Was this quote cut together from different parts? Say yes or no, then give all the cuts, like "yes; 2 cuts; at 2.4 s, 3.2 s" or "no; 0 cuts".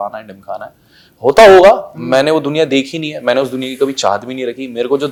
no; 0 cuts